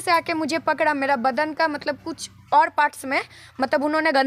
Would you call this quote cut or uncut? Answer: uncut